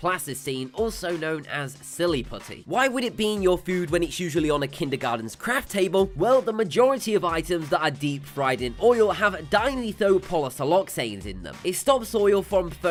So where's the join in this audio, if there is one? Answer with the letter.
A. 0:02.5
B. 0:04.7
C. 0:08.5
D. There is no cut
D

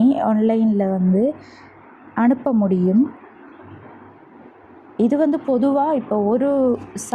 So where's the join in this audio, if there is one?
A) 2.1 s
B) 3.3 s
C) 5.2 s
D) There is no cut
D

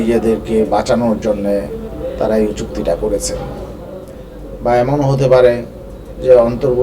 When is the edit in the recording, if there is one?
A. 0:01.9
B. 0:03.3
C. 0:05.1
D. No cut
A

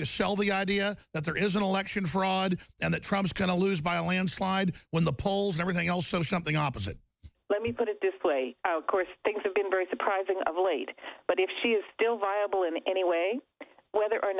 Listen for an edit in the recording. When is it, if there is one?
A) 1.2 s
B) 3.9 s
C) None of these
C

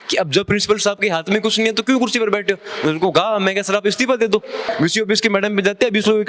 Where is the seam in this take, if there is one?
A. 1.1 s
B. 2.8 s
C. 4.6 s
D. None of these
C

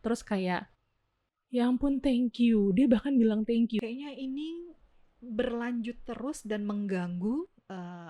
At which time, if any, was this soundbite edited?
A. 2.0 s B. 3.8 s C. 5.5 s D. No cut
B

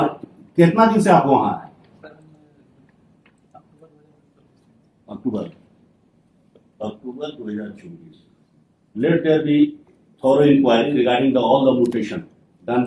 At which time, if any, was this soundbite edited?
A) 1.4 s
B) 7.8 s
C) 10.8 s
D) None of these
D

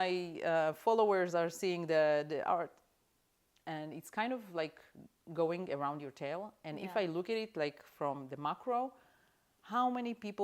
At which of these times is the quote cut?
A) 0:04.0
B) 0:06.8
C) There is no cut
C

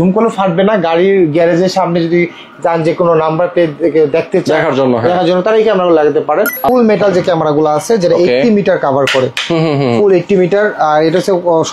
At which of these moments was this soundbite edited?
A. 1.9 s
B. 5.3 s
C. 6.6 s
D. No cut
C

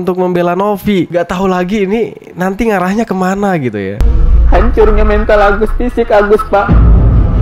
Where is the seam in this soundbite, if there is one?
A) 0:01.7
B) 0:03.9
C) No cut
B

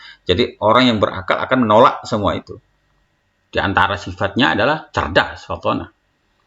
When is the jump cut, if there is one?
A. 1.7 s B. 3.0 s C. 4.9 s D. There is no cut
B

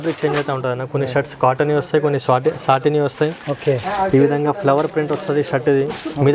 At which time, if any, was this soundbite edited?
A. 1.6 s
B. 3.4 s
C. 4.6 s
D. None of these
D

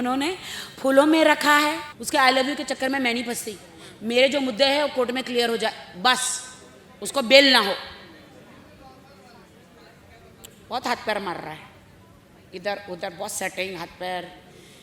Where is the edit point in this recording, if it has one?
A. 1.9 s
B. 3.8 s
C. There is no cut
A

